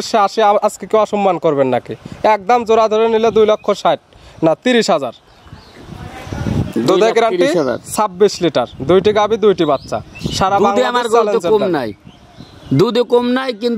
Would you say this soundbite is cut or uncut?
uncut